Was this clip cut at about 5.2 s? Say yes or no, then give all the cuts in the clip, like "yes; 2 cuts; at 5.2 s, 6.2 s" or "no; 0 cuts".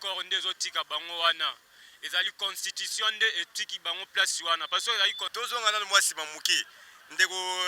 yes; 1 cut; at 5.2 s